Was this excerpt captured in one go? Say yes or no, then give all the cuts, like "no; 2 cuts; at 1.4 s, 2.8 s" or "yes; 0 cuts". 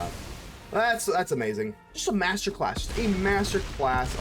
no; 1 cut; at 1.9 s